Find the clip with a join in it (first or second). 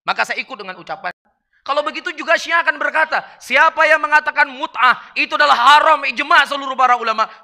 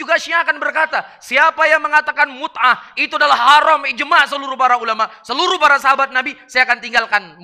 first